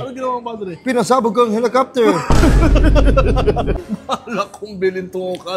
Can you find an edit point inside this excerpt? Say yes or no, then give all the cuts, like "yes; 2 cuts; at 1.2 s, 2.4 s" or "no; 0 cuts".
yes; 1 cut; at 3.8 s